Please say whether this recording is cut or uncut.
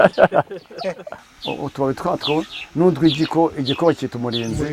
cut